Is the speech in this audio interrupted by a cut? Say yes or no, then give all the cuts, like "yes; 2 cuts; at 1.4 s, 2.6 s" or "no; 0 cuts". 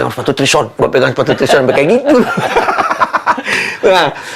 no; 0 cuts